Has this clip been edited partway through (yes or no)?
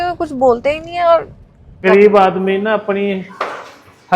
yes